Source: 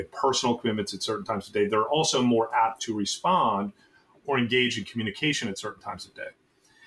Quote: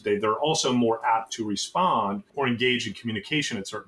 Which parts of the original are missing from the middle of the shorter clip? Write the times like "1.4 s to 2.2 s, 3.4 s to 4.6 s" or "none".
3.7 s to 4.2 s